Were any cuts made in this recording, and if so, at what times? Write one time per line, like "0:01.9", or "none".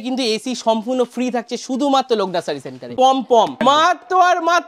0:02.9
0:03.6